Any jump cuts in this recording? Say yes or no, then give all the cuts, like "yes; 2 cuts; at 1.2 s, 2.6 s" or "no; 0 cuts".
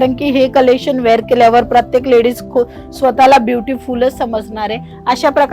no; 0 cuts